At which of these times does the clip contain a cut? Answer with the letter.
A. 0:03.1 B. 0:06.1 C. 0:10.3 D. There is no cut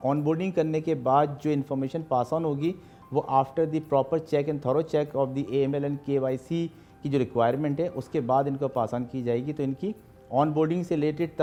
D